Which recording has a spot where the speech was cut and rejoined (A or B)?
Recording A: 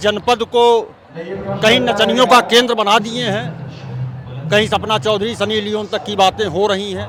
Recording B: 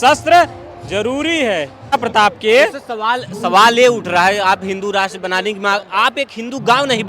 B